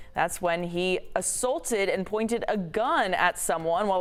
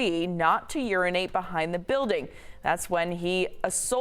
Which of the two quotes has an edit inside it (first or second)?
second